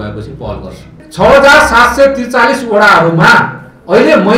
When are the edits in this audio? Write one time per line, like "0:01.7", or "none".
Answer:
0:01.0